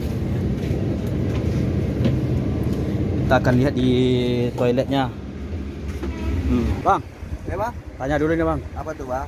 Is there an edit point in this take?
yes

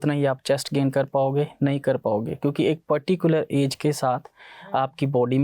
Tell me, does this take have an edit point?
no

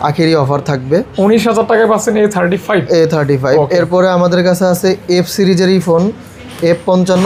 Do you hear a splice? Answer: no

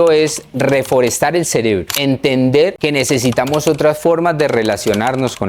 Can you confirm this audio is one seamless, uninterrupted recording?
no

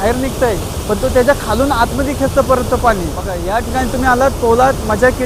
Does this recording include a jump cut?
yes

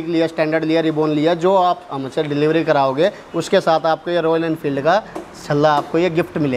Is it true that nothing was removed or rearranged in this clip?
yes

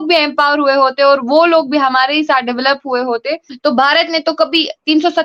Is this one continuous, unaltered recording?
no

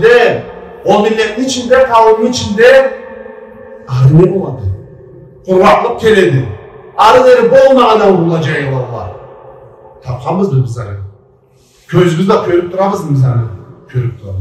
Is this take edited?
no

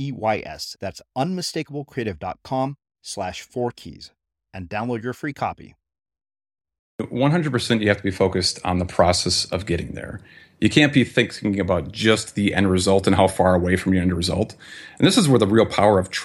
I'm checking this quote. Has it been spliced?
yes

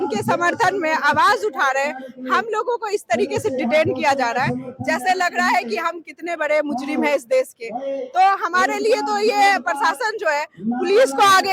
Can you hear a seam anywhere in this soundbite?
no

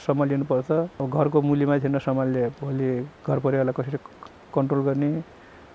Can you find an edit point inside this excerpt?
yes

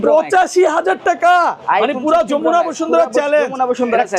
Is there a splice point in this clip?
no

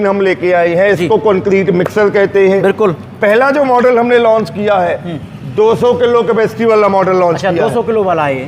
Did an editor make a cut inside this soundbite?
no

